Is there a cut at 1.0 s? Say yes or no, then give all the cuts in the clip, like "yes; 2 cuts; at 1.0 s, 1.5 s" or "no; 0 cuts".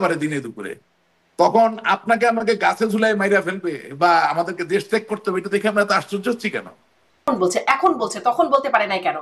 no; 1 cut; at 7.2 s